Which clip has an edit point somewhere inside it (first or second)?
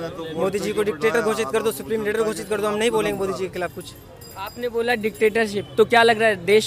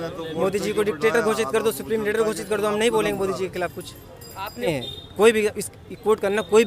second